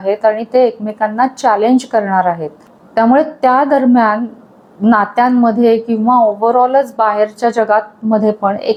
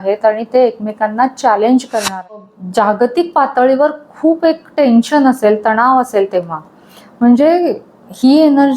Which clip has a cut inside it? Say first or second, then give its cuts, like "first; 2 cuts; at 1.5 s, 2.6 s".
second; 1 cut; at 2.5 s